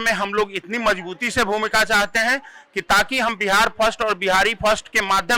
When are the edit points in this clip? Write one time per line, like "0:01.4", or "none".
none

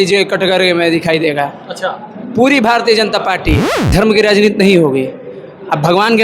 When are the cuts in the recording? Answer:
0:03.7

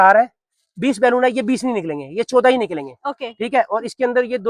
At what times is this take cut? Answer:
none

